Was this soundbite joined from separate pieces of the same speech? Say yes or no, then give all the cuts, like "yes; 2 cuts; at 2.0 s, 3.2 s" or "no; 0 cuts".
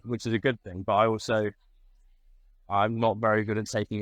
no; 0 cuts